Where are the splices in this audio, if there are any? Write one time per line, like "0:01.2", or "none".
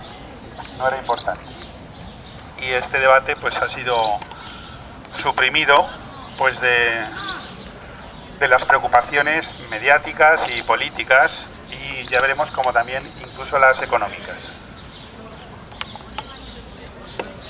0:12.7